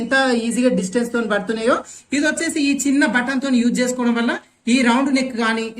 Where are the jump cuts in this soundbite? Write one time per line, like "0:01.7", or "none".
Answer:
0:01.9